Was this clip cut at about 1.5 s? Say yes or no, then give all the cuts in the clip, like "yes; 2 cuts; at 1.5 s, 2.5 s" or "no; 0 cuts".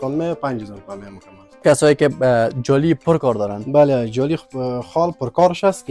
yes; 1 cut; at 1.5 s